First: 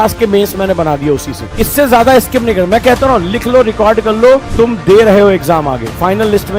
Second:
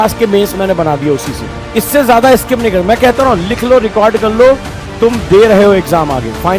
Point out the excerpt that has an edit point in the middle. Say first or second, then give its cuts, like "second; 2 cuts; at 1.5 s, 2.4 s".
first; 2 cuts; at 1.4 s, 4.5 s